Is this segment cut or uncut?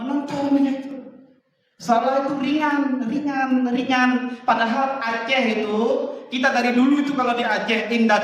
uncut